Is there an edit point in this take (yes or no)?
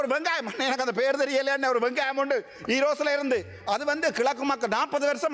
no